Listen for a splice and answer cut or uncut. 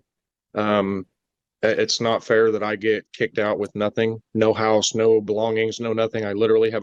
uncut